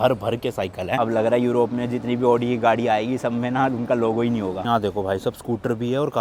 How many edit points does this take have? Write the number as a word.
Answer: two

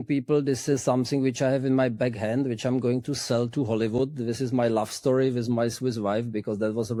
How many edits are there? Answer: zero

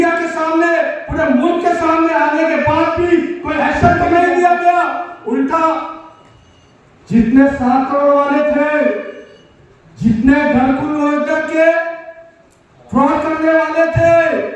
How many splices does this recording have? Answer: one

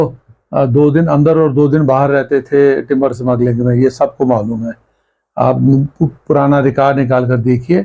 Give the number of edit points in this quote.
zero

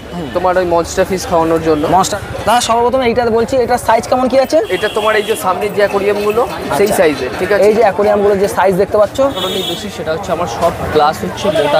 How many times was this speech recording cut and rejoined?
two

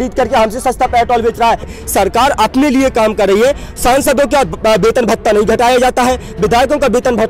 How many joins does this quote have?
one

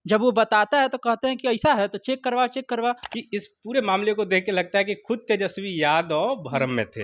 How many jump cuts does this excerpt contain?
one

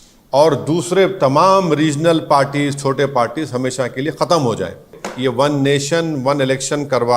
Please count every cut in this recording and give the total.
one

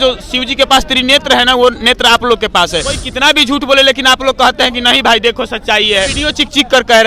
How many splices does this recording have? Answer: two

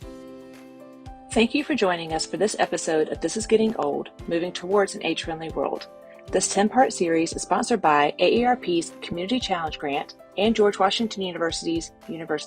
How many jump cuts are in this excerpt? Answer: one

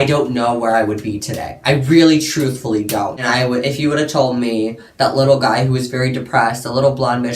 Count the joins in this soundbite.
one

